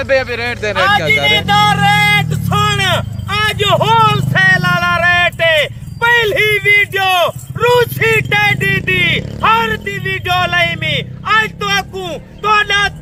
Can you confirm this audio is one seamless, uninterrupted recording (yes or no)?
yes